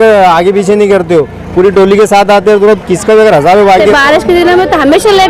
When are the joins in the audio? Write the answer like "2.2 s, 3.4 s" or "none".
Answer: 3.9 s